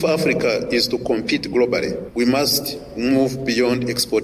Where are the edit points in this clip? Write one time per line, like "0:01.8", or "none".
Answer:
0:02.0